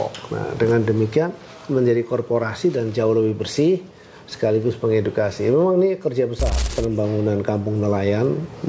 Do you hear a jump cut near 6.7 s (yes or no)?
yes